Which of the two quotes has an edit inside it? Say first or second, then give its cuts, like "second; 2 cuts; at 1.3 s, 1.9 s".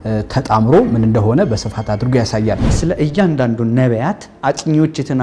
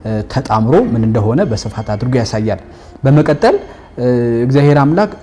first; 1 cut; at 2.7 s